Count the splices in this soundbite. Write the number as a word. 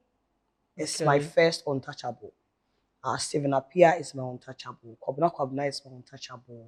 zero